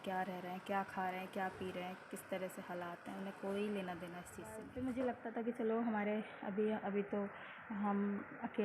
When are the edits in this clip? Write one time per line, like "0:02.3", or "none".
0:04.7